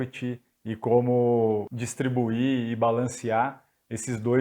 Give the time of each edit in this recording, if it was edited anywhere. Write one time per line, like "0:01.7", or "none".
0:01.7